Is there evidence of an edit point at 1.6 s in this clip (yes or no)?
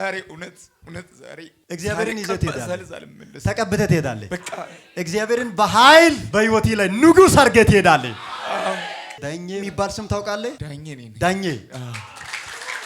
yes